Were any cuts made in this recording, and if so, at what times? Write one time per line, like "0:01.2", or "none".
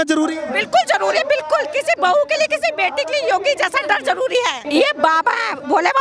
0:04.6